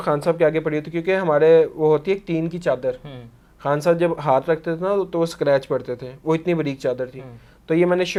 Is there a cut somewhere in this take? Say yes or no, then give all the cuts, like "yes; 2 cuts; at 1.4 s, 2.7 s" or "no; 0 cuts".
no; 0 cuts